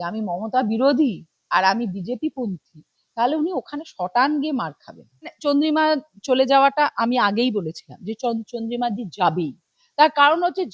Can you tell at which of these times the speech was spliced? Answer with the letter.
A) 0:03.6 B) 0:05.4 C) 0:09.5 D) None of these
B